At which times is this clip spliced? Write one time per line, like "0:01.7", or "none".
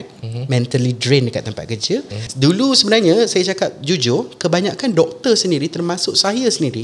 0:02.2